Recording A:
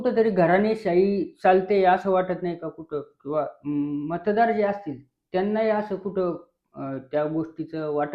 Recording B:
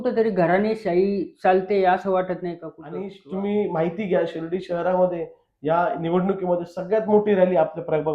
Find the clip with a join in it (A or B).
B